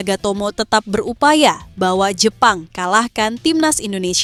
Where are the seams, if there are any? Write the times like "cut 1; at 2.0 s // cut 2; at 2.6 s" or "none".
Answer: none